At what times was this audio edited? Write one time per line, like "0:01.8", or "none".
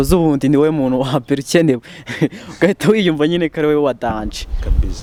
none